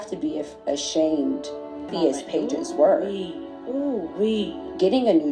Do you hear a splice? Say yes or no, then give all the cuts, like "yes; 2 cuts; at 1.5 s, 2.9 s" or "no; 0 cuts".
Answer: yes; 1 cut; at 1.9 s